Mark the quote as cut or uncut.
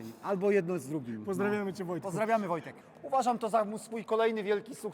cut